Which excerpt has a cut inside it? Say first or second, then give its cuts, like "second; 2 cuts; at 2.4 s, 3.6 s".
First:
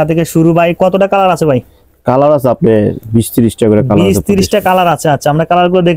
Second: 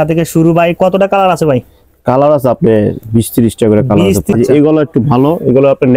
second; 1 cut; at 4.3 s